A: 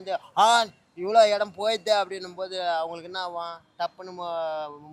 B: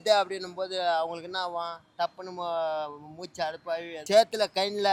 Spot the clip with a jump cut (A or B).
B